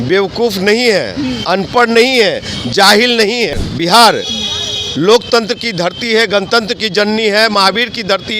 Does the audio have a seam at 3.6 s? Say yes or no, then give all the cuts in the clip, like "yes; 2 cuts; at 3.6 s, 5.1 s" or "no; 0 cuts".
yes; 1 cut; at 3.6 s